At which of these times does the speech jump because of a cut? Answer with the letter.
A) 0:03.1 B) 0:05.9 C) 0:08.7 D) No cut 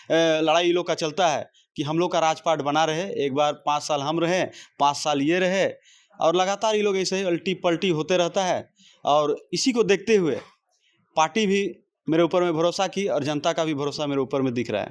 D